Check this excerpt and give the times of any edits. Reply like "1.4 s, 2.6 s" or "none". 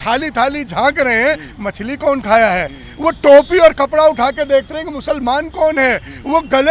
none